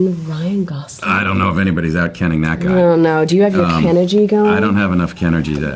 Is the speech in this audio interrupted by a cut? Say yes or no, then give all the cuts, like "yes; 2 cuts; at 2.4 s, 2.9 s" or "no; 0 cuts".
no; 0 cuts